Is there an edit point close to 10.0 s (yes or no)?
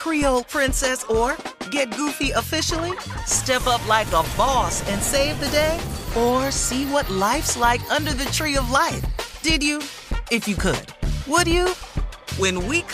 no